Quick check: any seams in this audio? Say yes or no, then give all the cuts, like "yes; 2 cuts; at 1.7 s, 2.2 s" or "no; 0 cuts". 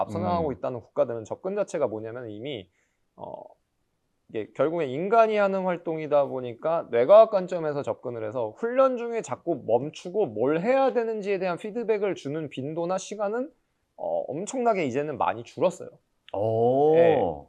no; 0 cuts